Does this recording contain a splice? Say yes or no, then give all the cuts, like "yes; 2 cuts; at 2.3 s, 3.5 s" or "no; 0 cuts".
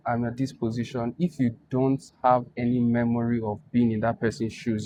no; 0 cuts